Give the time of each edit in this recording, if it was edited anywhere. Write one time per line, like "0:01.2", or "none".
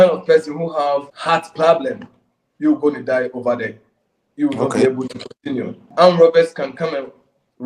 0:01.1
0:05.8

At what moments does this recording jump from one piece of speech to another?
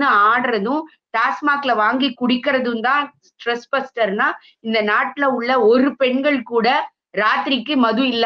none

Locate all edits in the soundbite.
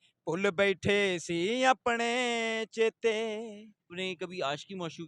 0:03.9

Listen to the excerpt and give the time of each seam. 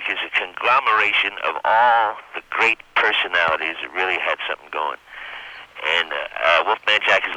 none

